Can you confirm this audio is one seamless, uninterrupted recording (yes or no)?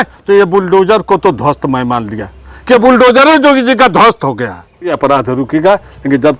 no